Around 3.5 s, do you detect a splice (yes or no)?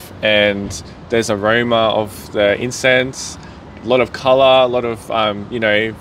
no